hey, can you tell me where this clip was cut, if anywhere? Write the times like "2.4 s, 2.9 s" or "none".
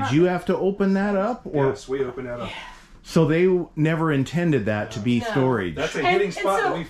none

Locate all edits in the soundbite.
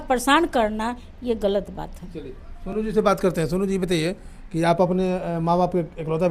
none

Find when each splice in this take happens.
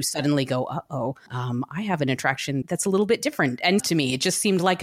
1.3 s, 2.6 s, 3.8 s

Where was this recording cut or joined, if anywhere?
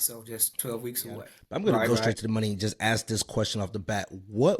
1.4 s

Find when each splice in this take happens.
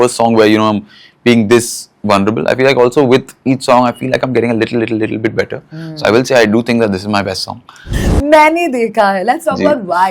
8.0 s

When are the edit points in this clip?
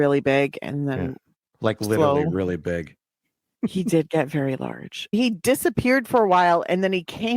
5.1 s

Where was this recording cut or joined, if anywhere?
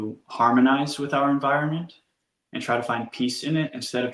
none

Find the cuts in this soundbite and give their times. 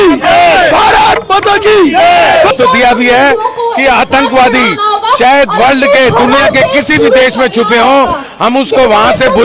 2.5 s

